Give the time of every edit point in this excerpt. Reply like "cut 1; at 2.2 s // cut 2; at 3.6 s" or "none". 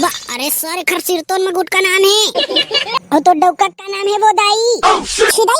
cut 1; at 2.7 s